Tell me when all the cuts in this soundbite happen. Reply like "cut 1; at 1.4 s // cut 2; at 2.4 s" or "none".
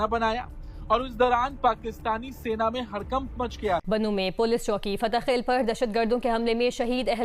cut 1; at 3.8 s